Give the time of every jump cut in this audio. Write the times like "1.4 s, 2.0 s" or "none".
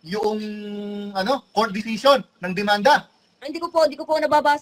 none